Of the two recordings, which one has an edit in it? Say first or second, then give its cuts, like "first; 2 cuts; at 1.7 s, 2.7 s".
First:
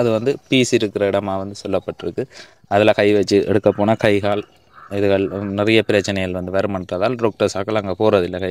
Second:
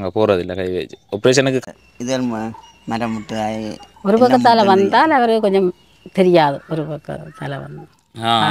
second; 1 cut; at 1.6 s